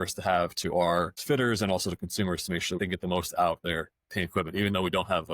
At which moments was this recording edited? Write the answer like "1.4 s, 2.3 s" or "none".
1.1 s, 2.8 s